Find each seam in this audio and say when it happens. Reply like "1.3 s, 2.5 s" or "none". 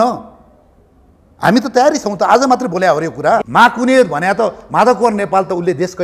3.4 s